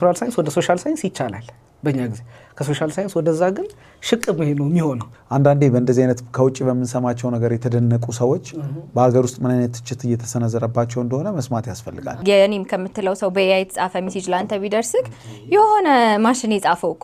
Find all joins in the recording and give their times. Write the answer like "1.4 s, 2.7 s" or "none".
5.1 s, 12.2 s